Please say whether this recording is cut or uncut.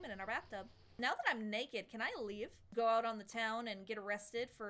cut